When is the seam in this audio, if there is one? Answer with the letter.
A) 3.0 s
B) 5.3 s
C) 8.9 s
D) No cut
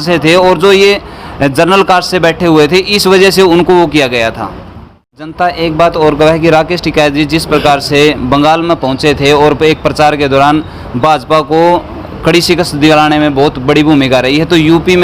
B